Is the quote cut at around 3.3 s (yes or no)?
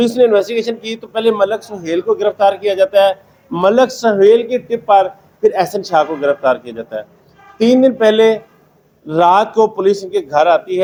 no